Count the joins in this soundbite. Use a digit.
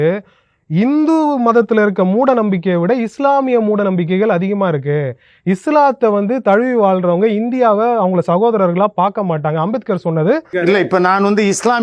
1